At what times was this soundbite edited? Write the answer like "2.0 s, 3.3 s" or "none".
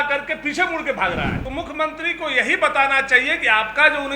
1.4 s